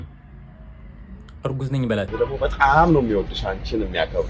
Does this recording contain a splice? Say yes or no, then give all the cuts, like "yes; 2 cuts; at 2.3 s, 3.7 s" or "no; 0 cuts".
yes; 1 cut; at 2.1 s